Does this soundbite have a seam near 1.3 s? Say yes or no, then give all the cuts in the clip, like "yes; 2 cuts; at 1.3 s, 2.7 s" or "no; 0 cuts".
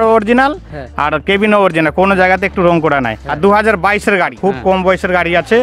no; 2 cuts; at 3.2 s, 4.3 s